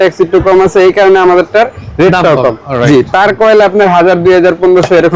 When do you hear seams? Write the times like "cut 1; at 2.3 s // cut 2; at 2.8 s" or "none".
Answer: none